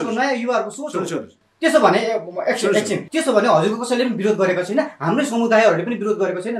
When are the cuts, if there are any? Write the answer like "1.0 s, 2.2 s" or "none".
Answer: 3.0 s